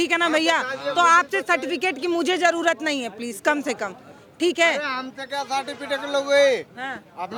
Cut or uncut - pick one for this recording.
uncut